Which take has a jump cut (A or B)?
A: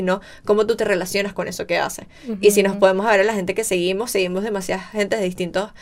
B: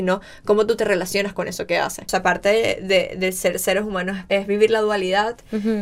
B